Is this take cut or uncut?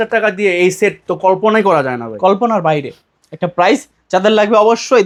uncut